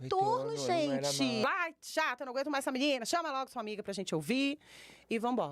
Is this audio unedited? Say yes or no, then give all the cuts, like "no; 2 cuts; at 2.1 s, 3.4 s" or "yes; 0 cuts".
no; 1 cut; at 1.4 s